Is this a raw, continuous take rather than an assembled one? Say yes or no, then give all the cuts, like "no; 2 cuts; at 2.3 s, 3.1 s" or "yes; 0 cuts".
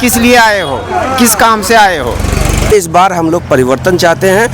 no; 1 cut; at 3.0 s